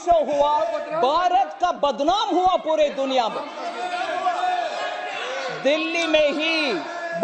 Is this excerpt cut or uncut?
uncut